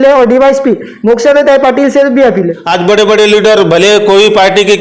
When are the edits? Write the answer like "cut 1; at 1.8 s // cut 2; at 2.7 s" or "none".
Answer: cut 1; at 2.6 s